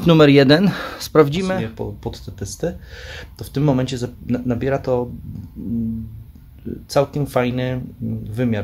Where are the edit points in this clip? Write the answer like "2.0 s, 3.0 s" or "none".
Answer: 1.5 s